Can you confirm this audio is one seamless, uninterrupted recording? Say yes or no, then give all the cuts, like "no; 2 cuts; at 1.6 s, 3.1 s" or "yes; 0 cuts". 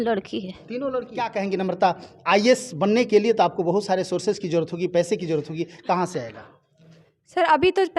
no; 1 cut; at 1.3 s